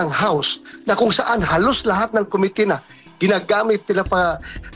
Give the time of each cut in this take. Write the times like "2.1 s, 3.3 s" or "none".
none